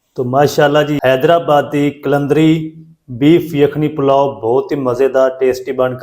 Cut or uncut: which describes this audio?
cut